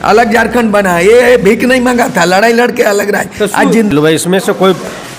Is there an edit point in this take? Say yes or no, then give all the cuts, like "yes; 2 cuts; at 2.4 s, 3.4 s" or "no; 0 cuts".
yes; 1 cut; at 3.9 s